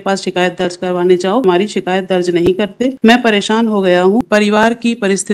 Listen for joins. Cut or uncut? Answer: cut